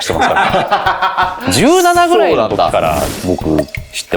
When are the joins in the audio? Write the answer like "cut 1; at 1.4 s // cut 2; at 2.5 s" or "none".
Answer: none